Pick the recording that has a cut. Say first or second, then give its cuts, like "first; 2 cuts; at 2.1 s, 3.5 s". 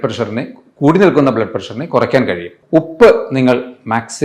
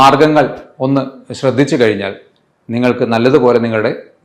first; 1 cut; at 2.5 s